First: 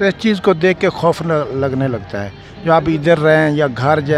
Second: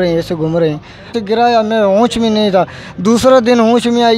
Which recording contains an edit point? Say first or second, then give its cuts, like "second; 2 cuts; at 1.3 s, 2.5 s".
second; 1 cut; at 1.2 s